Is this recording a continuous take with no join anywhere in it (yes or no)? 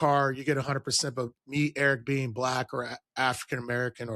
yes